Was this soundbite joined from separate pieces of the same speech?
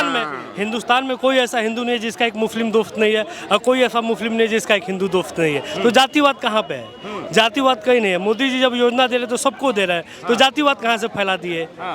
no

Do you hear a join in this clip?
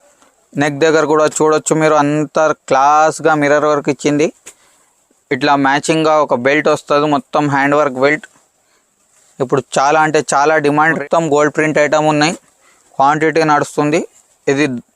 yes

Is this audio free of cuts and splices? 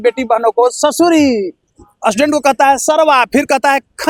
yes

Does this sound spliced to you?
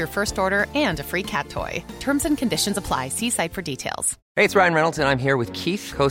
yes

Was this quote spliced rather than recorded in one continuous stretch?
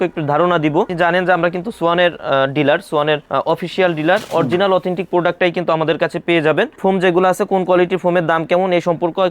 yes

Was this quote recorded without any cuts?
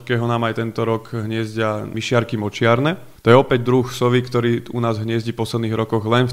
no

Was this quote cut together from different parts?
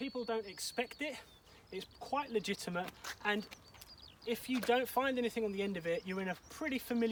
no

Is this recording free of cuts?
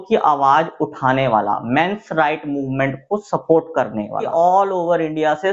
no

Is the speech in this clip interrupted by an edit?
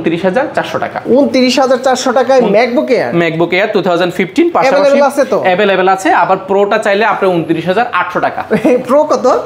no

